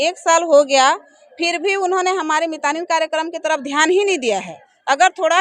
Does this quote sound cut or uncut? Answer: uncut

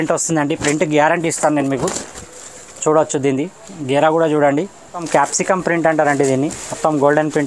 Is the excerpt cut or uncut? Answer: cut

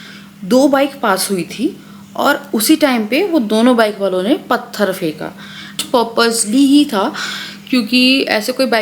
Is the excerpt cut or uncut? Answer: cut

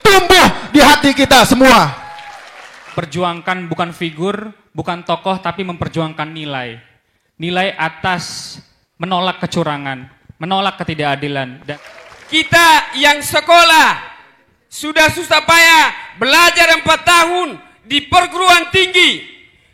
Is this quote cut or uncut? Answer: cut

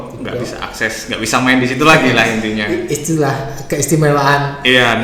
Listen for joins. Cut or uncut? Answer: uncut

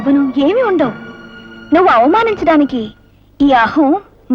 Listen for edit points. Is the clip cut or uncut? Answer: uncut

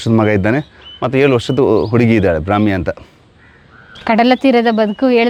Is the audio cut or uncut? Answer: uncut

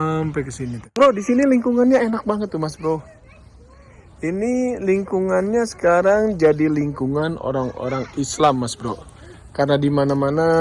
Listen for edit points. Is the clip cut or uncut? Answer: cut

